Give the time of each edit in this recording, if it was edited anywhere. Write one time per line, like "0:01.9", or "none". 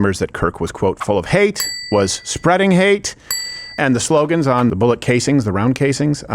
0:03.8
0:04.7